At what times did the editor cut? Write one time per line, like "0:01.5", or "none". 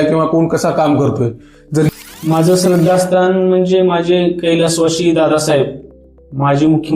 0:01.9